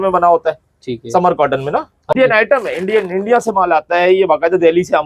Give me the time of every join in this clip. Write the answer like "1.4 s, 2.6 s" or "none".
2.1 s